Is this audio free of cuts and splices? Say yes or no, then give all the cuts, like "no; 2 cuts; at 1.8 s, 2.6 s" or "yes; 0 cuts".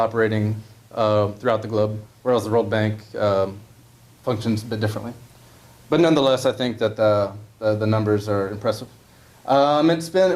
no; 1 cut; at 8.2 s